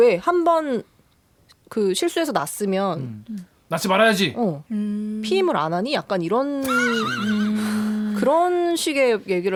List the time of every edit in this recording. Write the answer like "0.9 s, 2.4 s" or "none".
none